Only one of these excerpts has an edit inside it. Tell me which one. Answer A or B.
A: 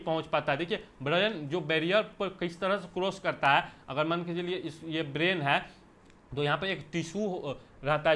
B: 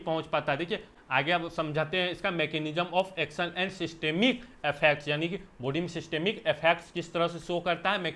B